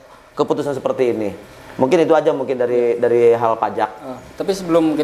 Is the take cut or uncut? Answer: uncut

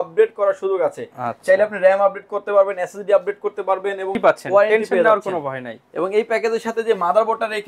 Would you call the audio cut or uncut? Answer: cut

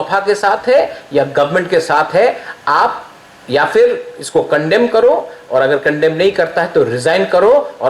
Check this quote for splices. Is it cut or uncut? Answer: cut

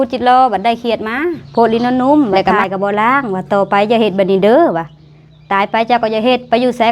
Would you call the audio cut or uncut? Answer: cut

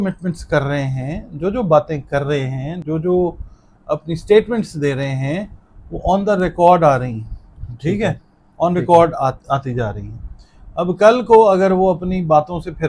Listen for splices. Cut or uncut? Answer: uncut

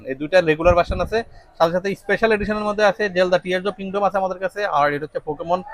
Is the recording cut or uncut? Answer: uncut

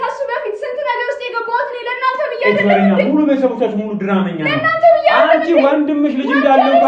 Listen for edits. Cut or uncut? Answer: uncut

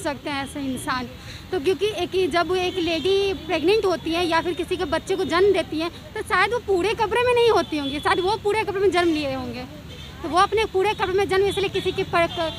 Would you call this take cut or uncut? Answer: uncut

